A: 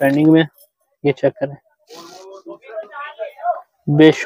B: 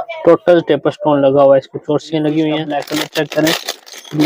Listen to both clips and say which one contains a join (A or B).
B